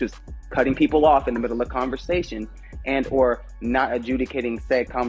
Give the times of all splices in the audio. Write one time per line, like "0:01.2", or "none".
none